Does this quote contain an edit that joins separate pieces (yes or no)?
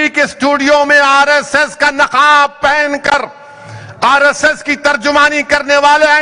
no